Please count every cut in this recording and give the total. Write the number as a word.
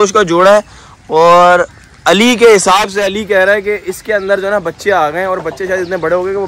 zero